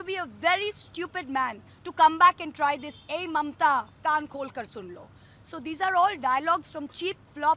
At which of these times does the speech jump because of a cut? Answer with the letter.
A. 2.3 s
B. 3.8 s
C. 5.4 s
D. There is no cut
D